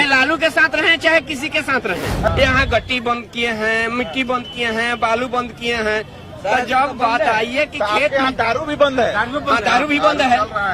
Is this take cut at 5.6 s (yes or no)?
no